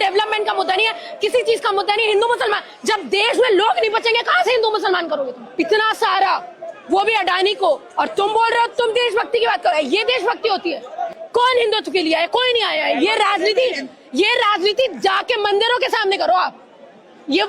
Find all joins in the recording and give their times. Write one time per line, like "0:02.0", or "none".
0:05.4
0:11.1